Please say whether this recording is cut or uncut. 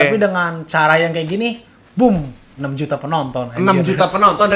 uncut